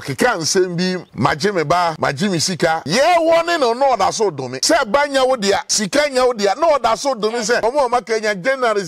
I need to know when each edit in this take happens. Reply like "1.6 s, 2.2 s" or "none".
1.1 s, 2.5 s, 4.5 s, 5.7 s, 7.6 s